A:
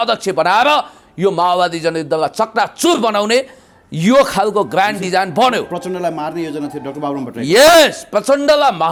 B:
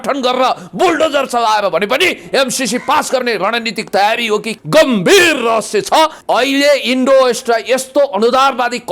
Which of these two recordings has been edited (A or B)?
B